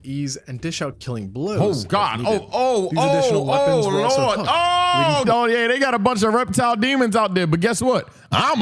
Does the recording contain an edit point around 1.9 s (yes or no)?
no